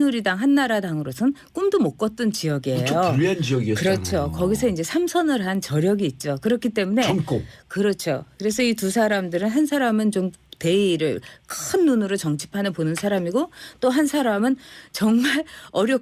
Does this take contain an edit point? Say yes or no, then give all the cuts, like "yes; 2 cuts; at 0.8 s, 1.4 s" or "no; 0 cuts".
no; 0 cuts